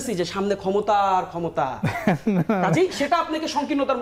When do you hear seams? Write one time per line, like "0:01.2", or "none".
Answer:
none